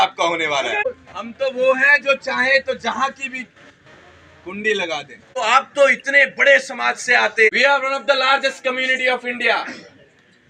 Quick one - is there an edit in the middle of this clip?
yes; 3 cuts; at 0.9 s, 5.2 s, 7.5 s

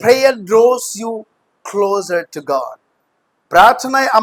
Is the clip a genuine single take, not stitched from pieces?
yes; 0 cuts

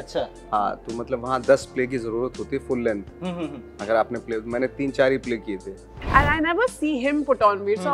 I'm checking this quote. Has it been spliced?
yes; 1 cut; at 5.9 s

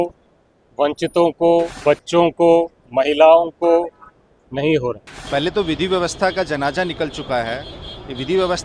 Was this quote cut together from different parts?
yes; 2 cuts; at 1.7 s, 5.1 s

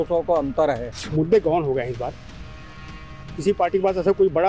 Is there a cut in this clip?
yes; 1 cut; at 1.0 s

